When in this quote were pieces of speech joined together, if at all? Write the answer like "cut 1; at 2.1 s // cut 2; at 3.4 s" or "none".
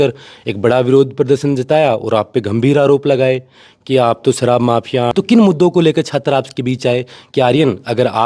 cut 1; at 5.1 s